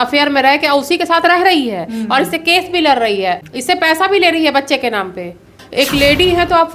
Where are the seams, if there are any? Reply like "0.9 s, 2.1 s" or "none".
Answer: 3.4 s, 5.6 s